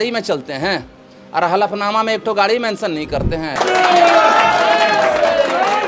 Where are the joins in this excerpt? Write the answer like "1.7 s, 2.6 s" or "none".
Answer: 3.5 s